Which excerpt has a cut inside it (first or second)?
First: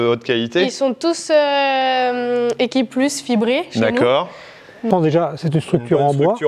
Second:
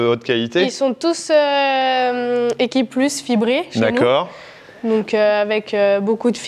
first